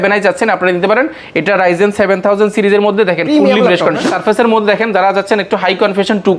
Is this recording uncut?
no; 1 cut; at 4.1 s

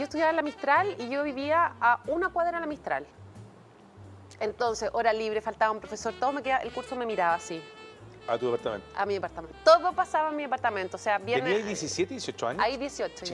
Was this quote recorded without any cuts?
yes; 0 cuts

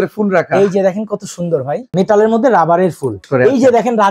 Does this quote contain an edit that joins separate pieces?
yes; 2 cuts; at 1.8 s, 3.2 s

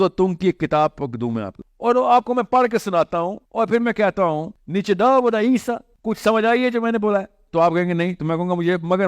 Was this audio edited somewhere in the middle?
yes; 4 cuts; at 1.5 s, 3.4 s, 4.5 s, 5.9 s

